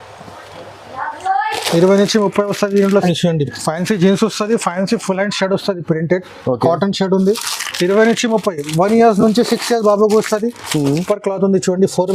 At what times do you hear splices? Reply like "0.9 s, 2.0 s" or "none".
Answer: 3.0 s, 11.0 s